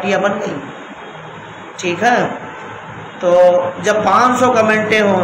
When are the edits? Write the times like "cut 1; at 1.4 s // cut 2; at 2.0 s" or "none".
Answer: none